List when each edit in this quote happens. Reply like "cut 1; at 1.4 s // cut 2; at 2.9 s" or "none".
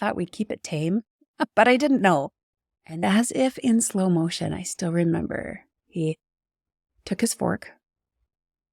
cut 1; at 3.0 s // cut 2; at 5.7 s